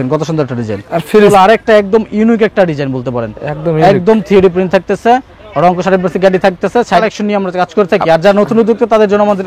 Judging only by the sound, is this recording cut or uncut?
cut